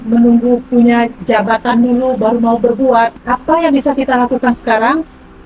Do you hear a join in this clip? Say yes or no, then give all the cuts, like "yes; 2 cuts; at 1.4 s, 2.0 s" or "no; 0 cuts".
yes; 1 cut; at 3.2 s